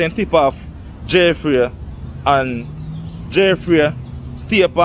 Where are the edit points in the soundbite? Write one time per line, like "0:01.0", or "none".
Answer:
none